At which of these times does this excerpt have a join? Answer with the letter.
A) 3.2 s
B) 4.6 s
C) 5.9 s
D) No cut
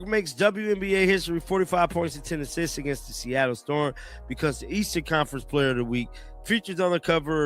C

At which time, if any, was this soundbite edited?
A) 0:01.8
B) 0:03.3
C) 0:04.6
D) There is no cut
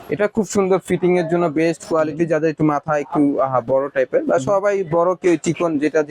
D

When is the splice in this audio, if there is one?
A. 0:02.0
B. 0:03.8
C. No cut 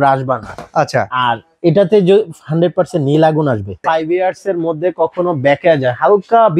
B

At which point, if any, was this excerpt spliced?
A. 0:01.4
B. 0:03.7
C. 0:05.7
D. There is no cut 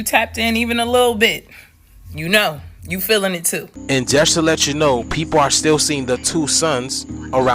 B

